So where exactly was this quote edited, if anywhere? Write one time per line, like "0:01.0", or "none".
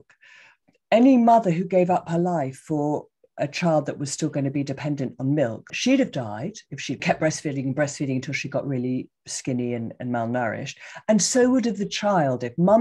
0:05.7
0:07.0